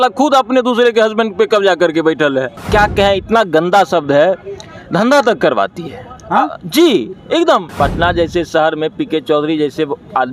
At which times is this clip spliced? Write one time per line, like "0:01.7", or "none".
0:02.6
0:07.7